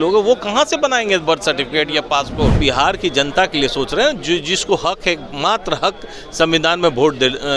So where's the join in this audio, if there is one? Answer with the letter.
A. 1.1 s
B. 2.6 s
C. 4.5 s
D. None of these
B